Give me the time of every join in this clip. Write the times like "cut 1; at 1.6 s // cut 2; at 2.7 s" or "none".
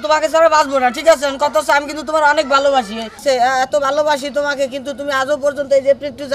cut 1; at 3.2 s